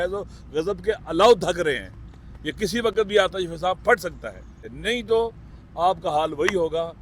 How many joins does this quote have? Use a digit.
1